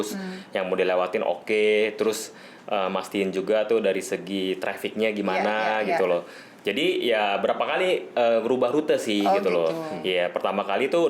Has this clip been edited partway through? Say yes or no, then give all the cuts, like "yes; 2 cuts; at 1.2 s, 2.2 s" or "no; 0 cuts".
no; 0 cuts